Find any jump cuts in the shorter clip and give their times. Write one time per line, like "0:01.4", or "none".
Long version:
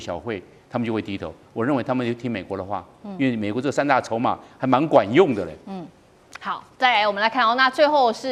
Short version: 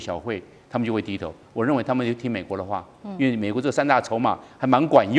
none